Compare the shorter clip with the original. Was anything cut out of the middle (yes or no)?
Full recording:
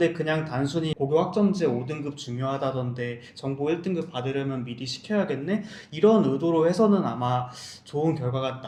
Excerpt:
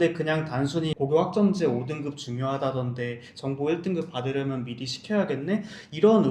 no